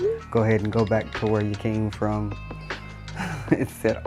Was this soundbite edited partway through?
no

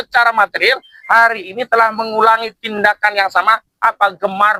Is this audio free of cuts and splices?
yes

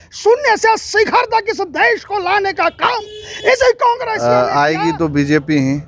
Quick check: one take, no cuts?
no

